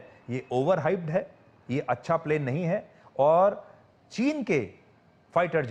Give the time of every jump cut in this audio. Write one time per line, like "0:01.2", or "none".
none